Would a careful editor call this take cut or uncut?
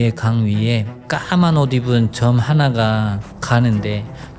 cut